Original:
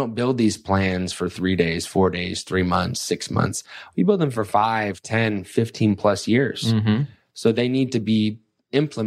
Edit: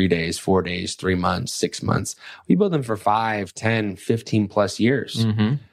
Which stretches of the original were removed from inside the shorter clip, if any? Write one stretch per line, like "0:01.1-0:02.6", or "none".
none